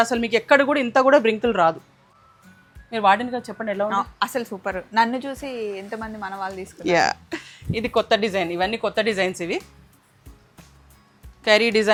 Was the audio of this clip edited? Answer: no; 0 cuts

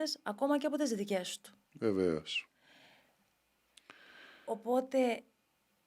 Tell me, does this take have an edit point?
no; 0 cuts

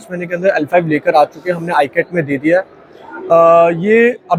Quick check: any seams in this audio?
no; 0 cuts

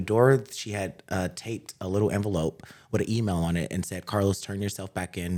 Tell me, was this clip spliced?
no; 0 cuts

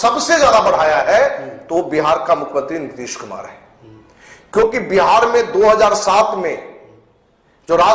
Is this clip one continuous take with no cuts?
yes; 0 cuts

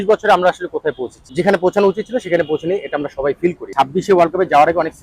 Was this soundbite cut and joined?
yes; 2 cuts; at 1.2 s, 3.6 s

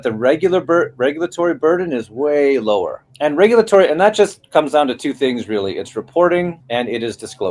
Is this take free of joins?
no; 2 cuts; at 3.0 s, 6.6 s

